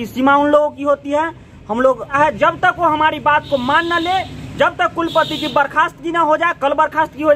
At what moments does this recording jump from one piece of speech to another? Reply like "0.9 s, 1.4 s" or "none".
2.1 s